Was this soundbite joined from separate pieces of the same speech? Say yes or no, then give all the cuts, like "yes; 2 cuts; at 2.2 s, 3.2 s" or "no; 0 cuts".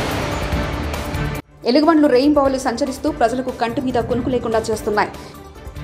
yes; 1 cut; at 1.1 s